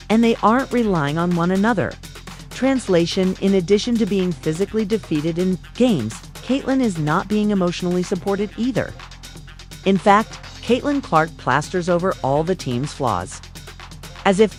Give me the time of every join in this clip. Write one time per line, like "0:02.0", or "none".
none